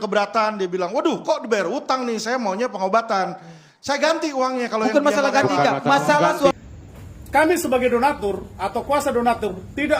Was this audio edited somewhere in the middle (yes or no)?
yes